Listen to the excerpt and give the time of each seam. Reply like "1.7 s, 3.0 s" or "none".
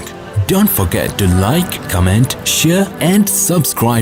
none